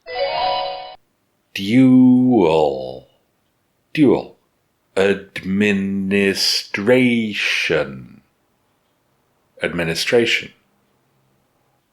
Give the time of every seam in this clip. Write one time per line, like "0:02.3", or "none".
0:00.9

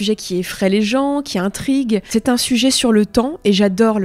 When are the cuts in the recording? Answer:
0:02.1

